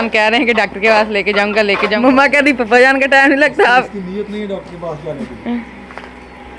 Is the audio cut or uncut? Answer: cut